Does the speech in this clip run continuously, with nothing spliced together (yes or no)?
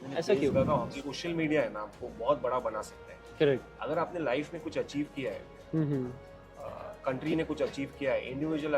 no